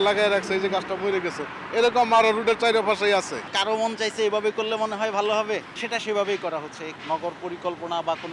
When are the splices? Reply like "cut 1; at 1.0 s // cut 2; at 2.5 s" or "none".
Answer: cut 1; at 3.5 s // cut 2; at 5.7 s // cut 3; at 6.9 s

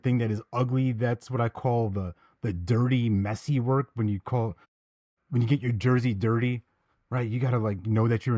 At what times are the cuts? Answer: none

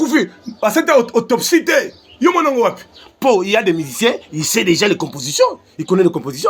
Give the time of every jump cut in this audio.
none

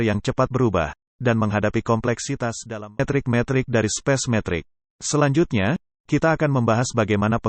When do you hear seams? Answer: cut 1; at 3.0 s

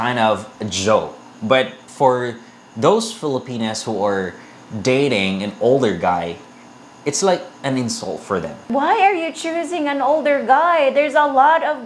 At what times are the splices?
cut 1; at 8.7 s

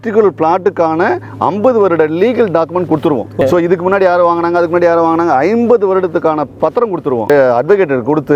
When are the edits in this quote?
cut 1; at 3.4 s // cut 2; at 7.3 s

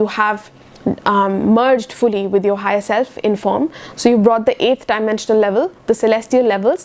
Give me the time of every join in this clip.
none

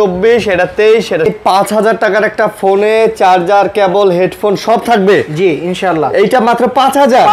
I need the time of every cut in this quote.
cut 1; at 1.3 s

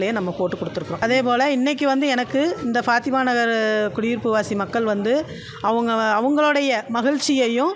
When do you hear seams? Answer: cut 1; at 1.0 s

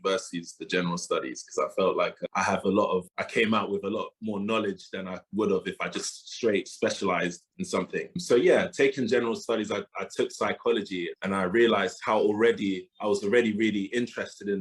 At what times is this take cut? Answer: cut 1; at 11.1 s // cut 2; at 12.0 s

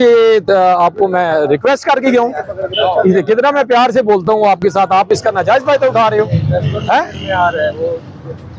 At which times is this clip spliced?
none

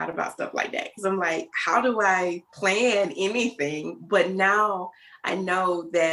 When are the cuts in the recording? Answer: cut 1; at 2.5 s

